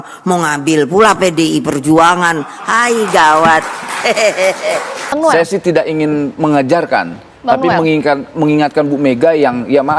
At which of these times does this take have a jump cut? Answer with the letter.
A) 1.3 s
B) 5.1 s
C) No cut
B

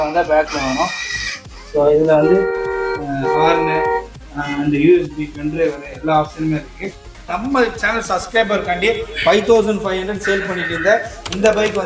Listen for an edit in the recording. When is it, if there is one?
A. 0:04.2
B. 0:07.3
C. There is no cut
B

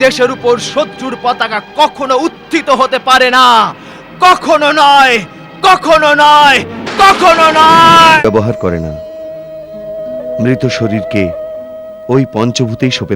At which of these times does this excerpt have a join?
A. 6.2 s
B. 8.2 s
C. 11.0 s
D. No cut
B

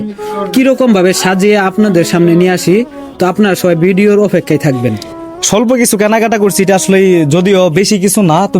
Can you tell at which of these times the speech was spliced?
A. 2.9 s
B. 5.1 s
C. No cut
B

